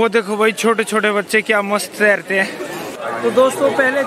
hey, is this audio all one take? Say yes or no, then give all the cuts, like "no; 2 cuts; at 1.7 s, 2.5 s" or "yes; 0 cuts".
yes; 0 cuts